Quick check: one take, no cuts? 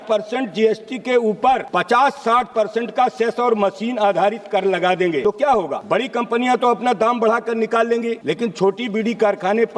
no; 3 cuts; at 1.7 s, 5.5 s, 8.2 s

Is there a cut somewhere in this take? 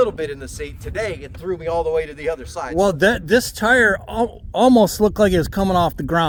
no; 0 cuts

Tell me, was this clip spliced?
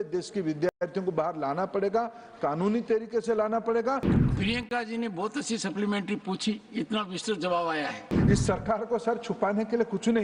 yes; 2 cuts; at 4.1 s, 8.1 s

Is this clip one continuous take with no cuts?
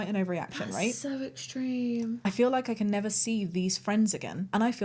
yes; 0 cuts

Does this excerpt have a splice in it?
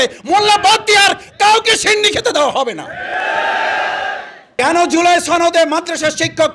yes; 1 cut; at 4.5 s

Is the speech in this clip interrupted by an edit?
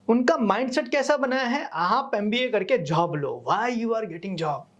no; 0 cuts

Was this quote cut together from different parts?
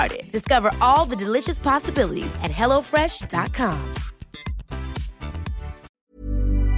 yes; 1 cut; at 5.9 s

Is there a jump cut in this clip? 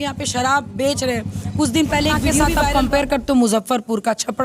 yes; 1 cut; at 2.6 s

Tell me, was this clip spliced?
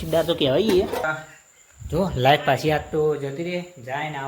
yes; 1 cut; at 1.2 s

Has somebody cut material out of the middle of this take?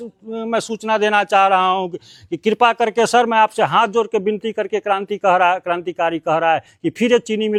no; 0 cuts

